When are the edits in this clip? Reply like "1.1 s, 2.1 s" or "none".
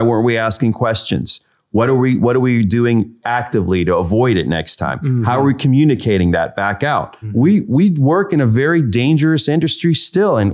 7.2 s